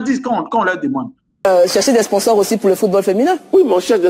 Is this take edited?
yes; 1 cut; at 1.4 s

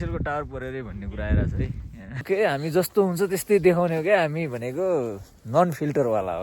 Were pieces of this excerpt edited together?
yes; 1 cut; at 2.2 s

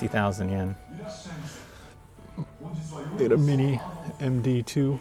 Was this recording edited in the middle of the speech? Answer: no; 0 cuts

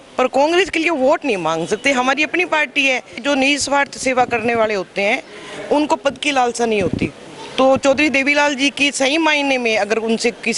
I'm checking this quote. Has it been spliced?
yes; 1 cut; at 3.1 s

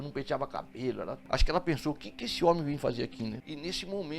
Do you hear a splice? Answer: yes; 2 cuts; at 1.2 s, 3.4 s

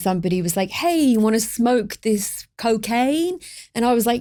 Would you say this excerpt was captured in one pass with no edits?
yes; 0 cuts

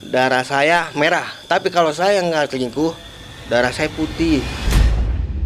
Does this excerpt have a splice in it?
no; 0 cuts

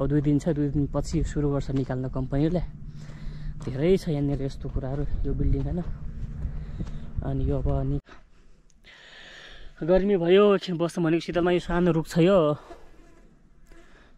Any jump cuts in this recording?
yes; 1 cut; at 8.0 s

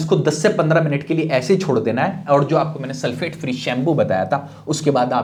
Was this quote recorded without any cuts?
yes; 0 cuts

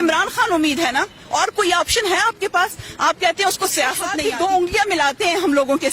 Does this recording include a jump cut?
yes; 1 cut; at 4.2 s

